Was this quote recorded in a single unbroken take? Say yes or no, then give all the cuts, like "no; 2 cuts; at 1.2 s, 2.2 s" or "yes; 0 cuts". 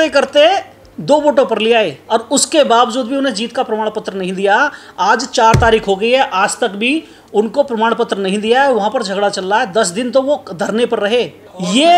no; 1 cut; at 2.0 s